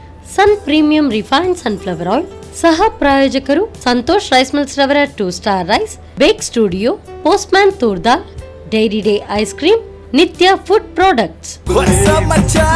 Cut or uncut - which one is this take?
uncut